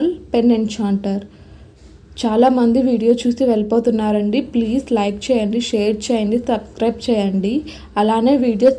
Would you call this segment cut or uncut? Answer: uncut